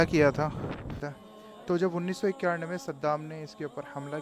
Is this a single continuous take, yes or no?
no